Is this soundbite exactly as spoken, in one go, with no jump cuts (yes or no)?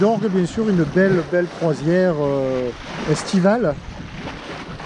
yes